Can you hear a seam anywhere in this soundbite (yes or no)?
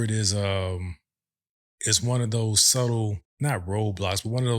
yes